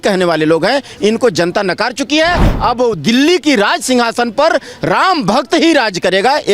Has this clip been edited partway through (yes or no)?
no